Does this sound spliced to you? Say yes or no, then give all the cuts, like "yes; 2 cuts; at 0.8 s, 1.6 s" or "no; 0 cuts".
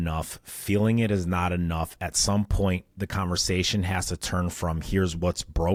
no; 0 cuts